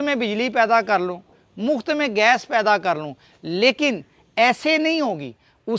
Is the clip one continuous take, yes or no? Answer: yes